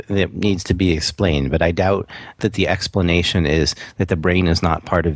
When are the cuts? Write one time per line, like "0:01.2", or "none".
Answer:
0:02.4